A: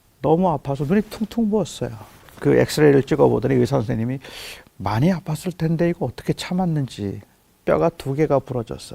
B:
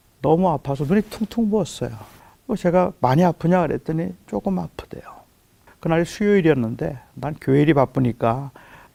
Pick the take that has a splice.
A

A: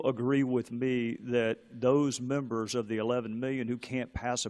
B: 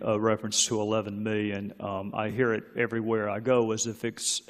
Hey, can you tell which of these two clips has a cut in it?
A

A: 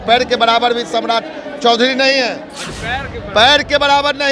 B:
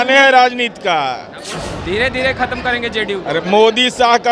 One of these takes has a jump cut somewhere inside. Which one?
B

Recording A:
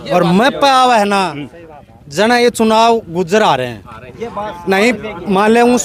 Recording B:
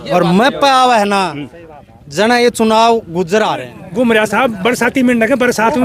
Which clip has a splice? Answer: B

